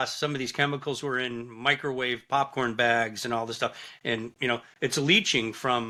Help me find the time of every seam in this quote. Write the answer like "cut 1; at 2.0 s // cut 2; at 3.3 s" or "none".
none